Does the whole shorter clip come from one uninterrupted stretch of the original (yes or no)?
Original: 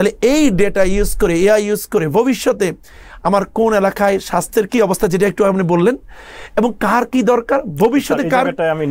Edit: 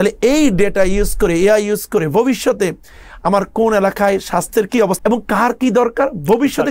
no